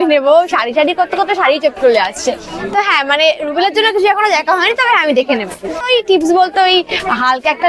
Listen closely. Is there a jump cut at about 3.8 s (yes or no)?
no